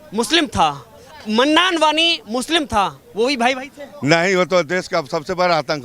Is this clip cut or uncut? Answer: uncut